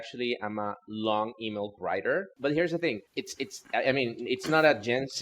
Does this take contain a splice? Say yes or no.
yes